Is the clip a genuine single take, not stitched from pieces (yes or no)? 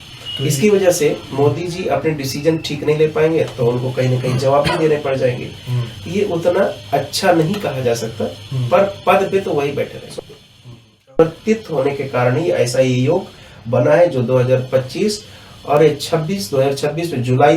no